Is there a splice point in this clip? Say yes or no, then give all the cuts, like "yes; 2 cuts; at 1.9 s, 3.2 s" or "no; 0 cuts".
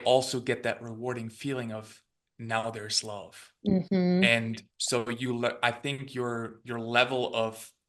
no; 0 cuts